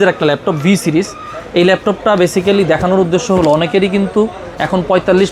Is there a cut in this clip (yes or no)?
no